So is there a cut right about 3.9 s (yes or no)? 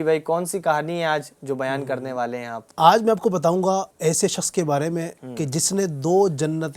yes